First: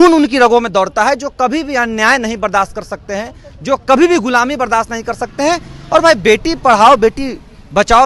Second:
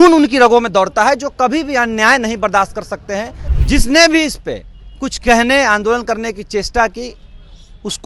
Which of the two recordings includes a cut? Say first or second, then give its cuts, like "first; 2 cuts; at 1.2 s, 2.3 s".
second; 1 cut; at 3.4 s